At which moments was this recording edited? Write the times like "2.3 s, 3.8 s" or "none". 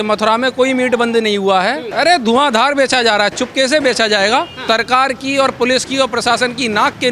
1.8 s, 4.6 s